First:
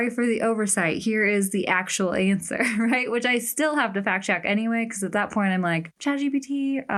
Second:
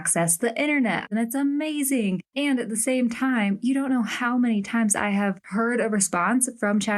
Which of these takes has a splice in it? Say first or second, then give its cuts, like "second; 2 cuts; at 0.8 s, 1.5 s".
second; 2 cuts; at 1.1 s, 2.3 s